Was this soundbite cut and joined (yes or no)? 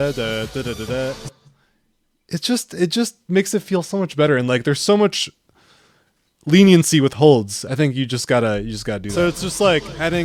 no